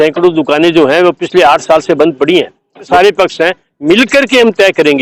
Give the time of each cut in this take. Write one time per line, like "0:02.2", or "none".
0:02.9